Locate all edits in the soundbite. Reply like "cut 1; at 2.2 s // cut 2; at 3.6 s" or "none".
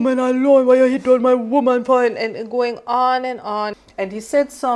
cut 1; at 3.8 s